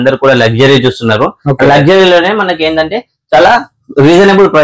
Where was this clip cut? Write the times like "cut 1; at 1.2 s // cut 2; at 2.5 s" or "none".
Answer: none